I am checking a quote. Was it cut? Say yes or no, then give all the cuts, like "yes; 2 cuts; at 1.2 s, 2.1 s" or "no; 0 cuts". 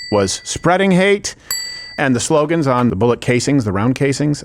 yes; 2 cuts; at 2.0 s, 2.9 s